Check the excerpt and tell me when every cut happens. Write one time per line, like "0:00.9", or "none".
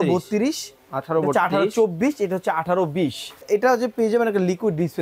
0:03.4